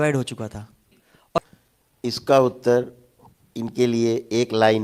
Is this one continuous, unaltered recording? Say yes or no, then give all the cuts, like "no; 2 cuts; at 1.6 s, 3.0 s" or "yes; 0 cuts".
no; 1 cut; at 1.4 s